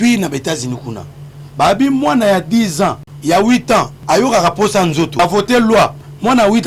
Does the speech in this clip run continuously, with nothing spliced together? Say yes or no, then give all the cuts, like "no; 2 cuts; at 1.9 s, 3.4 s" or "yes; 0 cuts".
no; 3 cuts; at 3.1 s, 4.0 s, 5.2 s